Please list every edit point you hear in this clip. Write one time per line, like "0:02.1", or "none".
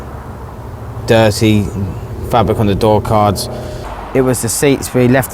0:03.9